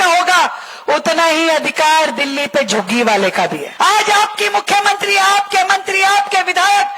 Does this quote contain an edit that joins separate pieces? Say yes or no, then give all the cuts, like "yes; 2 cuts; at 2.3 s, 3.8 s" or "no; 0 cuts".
yes; 1 cut; at 3.6 s